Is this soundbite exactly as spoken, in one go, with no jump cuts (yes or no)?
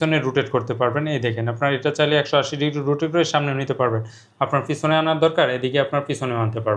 yes